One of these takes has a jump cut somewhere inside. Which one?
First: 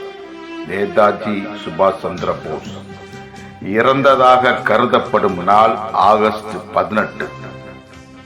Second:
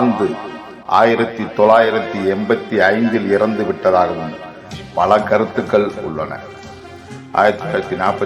first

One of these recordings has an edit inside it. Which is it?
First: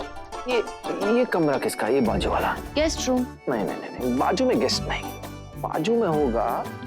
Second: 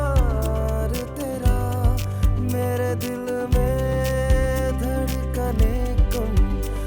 first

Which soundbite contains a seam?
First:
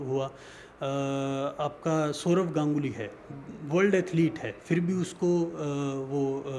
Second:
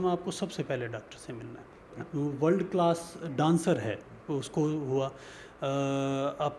second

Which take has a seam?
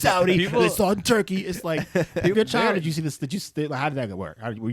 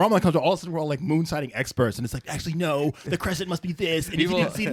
first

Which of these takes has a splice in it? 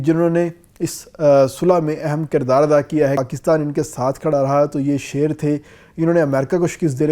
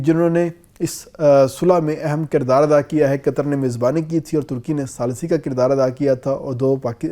first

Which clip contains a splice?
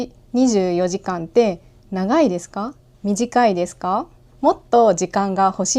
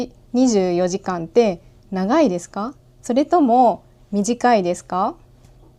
first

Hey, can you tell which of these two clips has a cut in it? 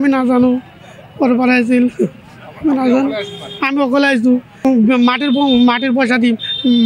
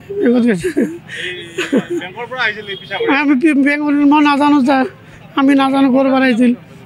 first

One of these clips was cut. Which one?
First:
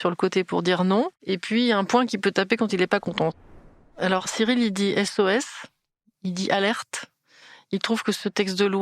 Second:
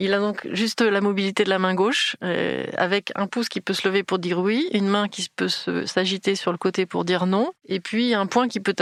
first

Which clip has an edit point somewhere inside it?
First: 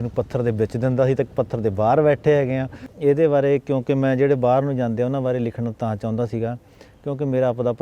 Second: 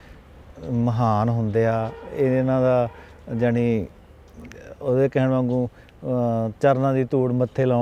first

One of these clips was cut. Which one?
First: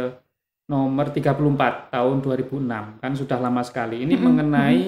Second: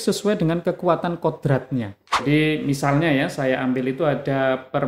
second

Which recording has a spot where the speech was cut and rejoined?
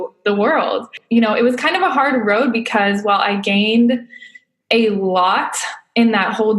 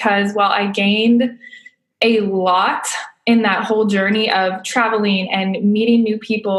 first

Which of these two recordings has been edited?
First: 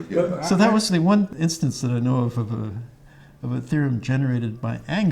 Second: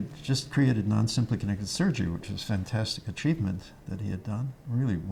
first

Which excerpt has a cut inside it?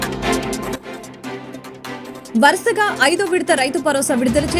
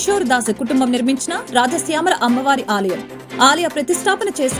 first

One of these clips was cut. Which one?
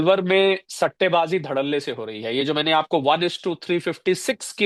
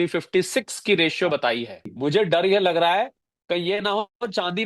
second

